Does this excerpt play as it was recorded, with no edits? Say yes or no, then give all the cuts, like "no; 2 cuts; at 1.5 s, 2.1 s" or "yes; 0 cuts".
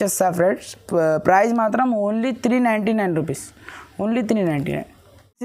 yes; 0 cuts